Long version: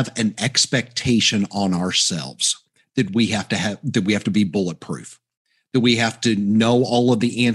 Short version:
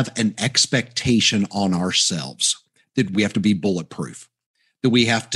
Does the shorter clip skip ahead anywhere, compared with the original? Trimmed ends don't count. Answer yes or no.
yes